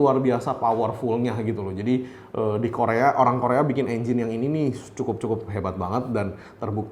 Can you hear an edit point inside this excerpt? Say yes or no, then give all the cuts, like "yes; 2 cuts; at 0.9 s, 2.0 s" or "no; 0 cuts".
no; 0 cuts